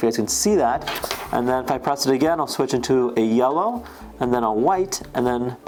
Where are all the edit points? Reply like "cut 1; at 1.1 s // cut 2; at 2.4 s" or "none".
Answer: none